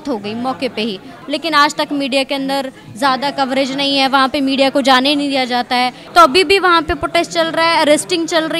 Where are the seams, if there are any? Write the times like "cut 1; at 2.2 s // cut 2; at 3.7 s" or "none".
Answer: cut 1; at 1.1 s // cut 2; at 6.0 s